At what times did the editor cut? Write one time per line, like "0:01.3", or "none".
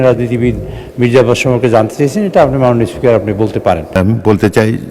0:04.0

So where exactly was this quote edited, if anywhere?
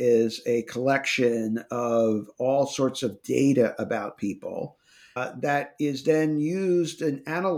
0:05.2

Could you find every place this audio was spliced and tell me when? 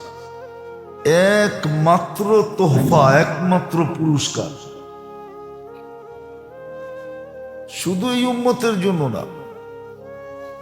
0:04.5
0:05.9
0:07.4

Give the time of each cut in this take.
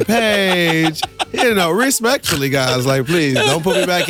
none

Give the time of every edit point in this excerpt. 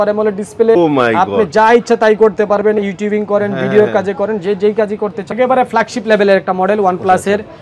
0:00.8
0:05.3

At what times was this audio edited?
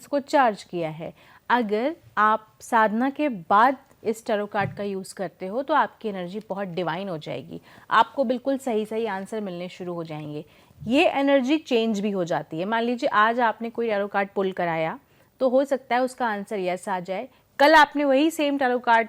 none

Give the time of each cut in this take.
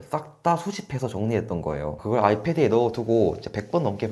0:02.0

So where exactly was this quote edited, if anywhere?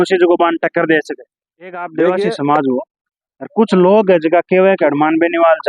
0:01.8

